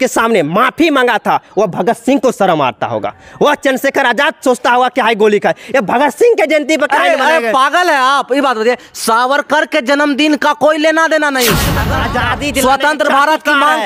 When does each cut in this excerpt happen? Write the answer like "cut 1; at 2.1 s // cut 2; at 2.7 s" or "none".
cut 1; at 11.8 s